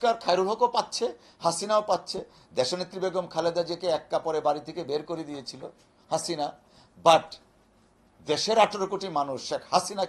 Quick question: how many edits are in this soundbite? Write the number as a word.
zero